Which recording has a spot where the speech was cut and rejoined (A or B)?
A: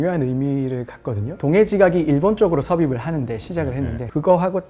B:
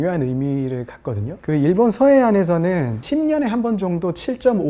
A